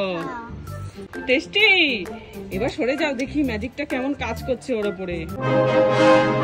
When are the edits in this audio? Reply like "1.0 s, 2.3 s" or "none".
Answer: 1.1 s, 5.4 s